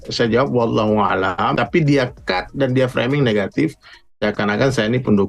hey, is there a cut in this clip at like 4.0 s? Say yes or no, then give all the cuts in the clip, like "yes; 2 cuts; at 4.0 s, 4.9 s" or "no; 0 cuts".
no; 1 cut; at 1.5 s